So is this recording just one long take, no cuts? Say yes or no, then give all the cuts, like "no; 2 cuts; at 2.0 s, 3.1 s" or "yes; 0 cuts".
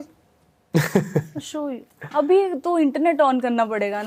yes; 0 cuts